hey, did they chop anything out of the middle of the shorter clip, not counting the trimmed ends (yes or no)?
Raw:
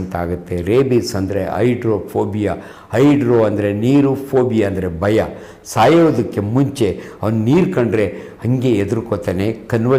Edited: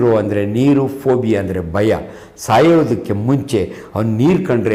no